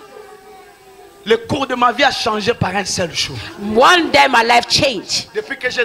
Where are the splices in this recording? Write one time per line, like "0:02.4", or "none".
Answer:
none

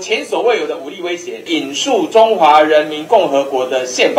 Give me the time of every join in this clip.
0:01.4

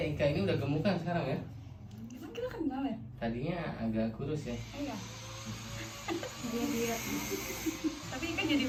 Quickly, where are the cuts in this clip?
none

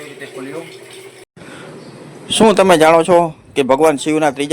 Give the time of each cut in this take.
0:01.2

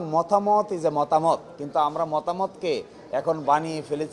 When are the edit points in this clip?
none

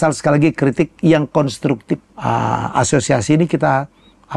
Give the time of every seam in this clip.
0:02.1

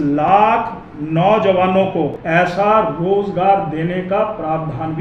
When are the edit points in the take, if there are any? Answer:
0:02.2

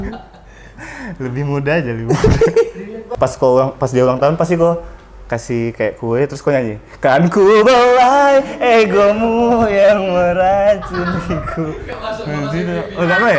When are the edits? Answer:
0:03.0

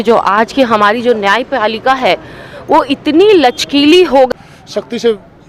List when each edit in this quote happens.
0:04.3

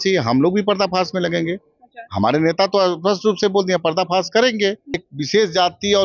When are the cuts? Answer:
0:05.1

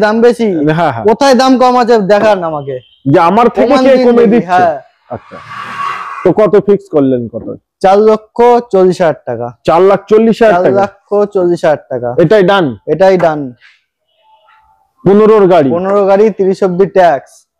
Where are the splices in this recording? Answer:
none

